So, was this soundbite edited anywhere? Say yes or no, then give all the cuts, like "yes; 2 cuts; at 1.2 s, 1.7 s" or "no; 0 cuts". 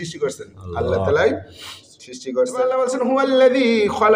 yes; 1 cut; at 2.7 s